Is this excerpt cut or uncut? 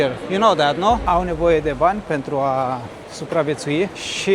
cut